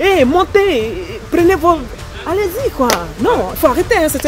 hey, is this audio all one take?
yes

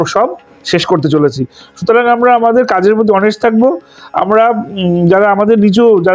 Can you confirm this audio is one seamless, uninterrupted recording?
yes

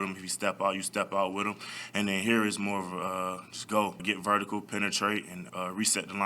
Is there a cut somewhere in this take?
yes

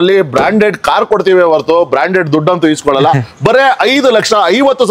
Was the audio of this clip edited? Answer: no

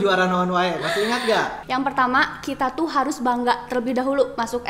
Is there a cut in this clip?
yes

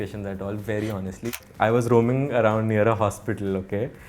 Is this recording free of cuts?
no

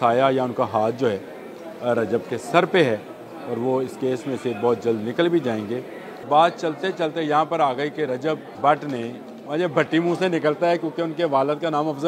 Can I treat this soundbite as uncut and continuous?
no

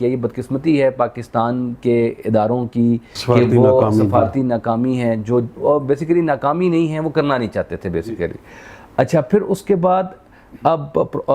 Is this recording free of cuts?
yes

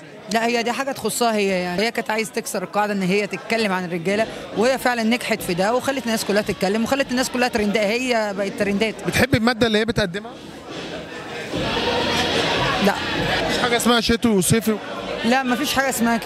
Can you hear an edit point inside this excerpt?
yes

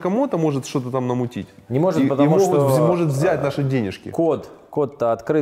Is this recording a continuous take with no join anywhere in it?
yes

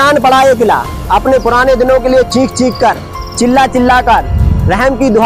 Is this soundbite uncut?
yes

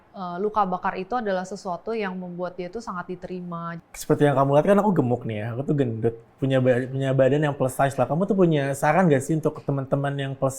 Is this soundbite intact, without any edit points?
no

